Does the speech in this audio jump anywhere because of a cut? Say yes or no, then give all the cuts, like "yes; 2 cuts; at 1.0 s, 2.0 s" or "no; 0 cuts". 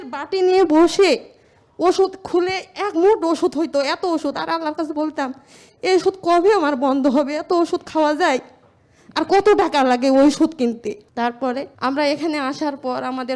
yes; 1 cut; at 11.7 s